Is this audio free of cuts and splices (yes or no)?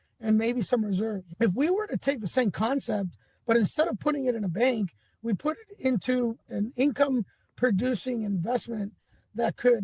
no